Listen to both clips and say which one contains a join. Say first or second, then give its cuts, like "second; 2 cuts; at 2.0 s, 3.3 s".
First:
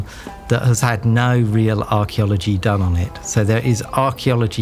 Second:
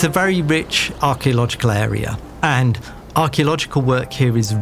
second; 1 cut; at 2.2 s